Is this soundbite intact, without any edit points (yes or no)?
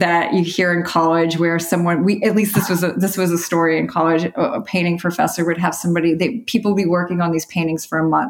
yes